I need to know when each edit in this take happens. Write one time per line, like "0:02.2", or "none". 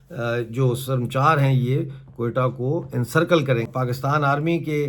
0:03.7